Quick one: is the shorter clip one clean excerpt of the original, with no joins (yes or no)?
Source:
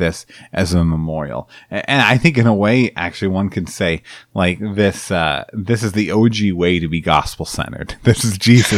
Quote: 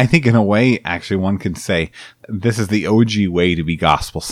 no